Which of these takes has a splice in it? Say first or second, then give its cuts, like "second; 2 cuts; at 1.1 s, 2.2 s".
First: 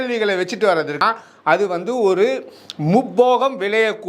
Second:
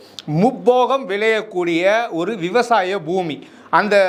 first; 1 cut; at 1.0 s